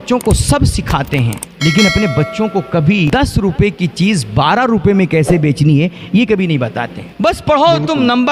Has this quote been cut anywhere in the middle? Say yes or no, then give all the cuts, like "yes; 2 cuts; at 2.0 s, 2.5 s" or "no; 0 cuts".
yes; 3 cuts; at 1.4 s, 3.1 s, 7.1 s